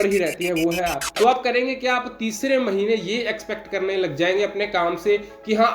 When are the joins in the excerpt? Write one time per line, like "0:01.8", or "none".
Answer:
0:01.0